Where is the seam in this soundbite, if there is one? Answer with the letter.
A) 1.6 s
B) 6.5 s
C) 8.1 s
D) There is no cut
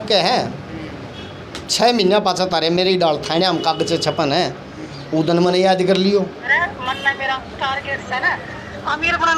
B